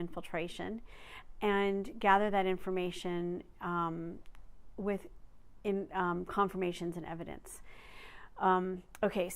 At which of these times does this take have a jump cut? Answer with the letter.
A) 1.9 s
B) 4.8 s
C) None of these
A